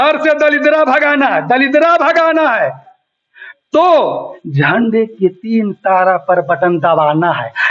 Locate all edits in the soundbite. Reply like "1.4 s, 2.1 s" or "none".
none